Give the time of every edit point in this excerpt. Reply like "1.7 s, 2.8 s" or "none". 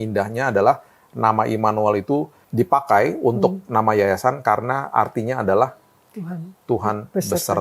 2.4 s